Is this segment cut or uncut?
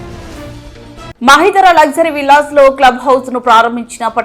uncut